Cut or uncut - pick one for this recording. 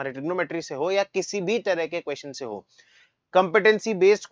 uncut